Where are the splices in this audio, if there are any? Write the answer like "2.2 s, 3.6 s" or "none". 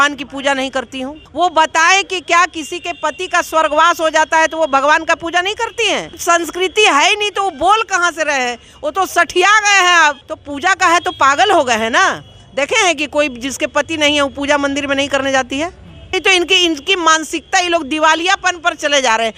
1.2 s, 6.2 s, 10.3 s, 16.1 s

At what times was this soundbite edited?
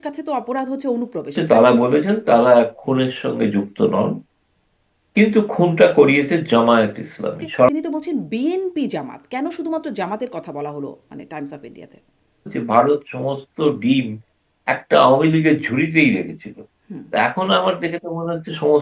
1.4 s, 7.7 s, 12.5 s

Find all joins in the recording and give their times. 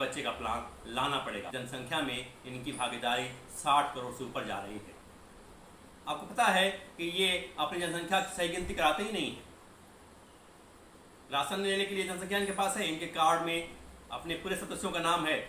1.4 s

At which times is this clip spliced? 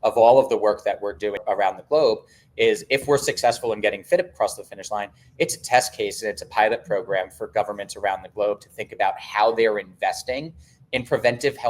1.4 s

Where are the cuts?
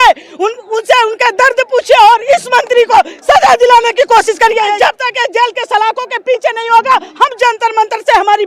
4.7 s

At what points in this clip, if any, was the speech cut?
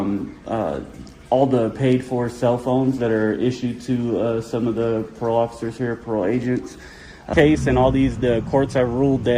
7.3 s

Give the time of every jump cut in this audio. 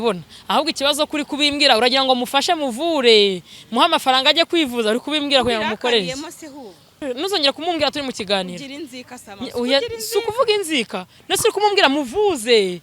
7.0 s

